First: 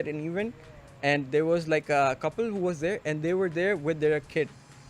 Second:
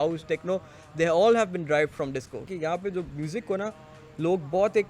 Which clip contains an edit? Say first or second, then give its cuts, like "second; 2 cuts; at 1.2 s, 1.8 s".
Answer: second; 1 cut; at 2.5 s